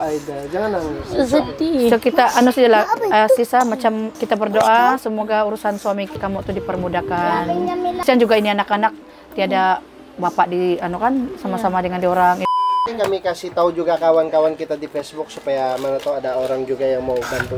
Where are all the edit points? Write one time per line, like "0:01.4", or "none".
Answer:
0:04.1
0:06.1
0:08.0
0:12.5